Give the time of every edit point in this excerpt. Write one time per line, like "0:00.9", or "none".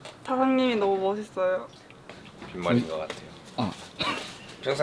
none